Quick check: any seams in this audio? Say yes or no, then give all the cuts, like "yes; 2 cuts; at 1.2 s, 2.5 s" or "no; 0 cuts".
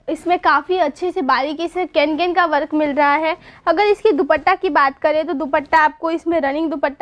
no; 0 cuts